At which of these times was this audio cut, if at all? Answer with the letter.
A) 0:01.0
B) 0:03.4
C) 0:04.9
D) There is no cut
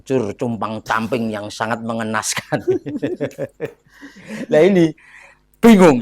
D